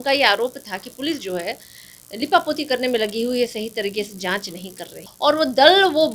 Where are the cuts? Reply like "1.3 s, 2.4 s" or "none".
5.0 s